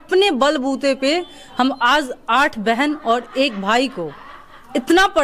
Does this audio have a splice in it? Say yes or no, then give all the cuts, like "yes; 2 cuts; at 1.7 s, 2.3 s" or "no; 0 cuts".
no; 0 cuts